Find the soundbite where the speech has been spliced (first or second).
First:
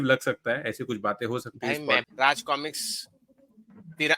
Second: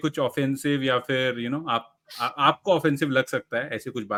first